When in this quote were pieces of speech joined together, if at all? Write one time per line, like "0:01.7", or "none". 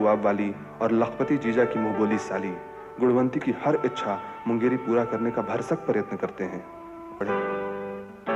0:07.2